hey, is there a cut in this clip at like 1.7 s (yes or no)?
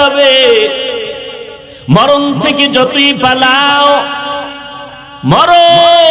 yes